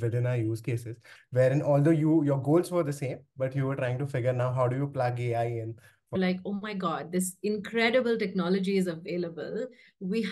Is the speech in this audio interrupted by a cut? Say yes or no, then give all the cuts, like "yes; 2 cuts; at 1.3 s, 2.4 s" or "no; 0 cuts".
yes; 2 cuts; at 1.1 s, 6.1 s